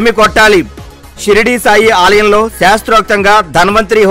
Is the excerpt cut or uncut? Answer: uncut